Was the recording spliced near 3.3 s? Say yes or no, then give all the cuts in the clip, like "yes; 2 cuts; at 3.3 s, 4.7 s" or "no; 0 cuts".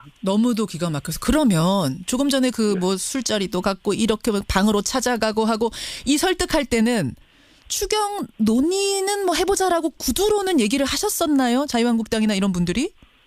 yes; 1 cut; at 3.3 s